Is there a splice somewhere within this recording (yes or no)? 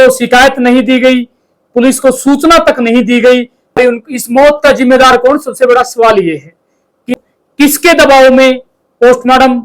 yes